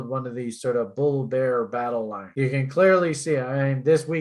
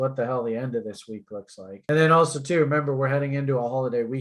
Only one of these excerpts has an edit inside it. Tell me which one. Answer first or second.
first